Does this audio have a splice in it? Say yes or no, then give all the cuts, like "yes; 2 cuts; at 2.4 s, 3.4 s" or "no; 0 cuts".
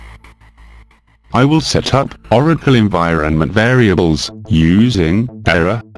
yes; 1 cut; at 1.3 s